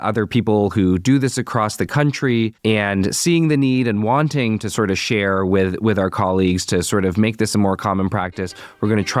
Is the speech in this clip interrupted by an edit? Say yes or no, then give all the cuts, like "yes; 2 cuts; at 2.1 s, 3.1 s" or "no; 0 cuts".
no; 0 cuts